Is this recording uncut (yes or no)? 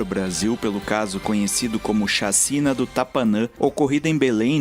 no